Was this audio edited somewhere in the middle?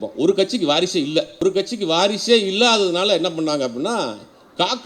yes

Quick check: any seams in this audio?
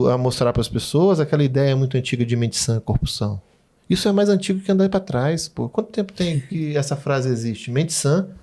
no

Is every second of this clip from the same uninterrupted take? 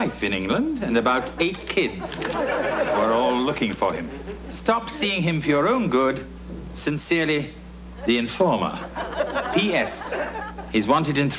no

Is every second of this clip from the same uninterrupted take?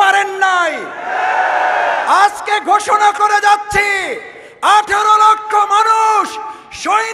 yes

